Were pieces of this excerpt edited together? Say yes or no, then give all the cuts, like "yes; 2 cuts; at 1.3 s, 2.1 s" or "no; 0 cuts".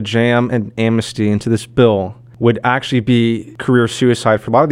yes; 2 cuts; at 2.2 s, 3.5 s